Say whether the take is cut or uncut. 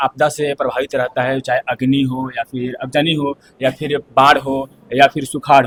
uncut